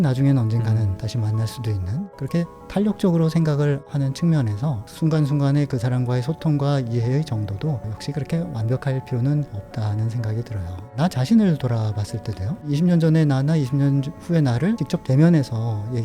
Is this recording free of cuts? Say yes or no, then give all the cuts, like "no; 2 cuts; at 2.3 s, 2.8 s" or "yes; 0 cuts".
no; 4 cuts; at 2.0 s, 3.9 s, 10.9 s, 12.6 s